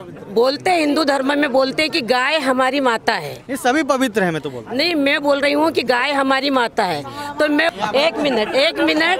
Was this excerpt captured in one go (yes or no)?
no